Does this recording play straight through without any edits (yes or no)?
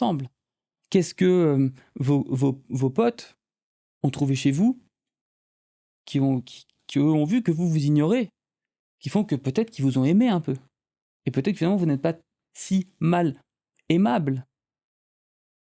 yes